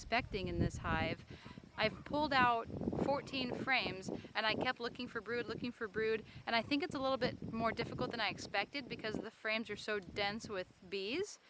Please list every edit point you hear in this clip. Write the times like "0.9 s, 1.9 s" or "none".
none